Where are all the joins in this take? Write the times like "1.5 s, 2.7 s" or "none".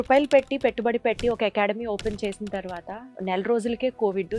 3.0 s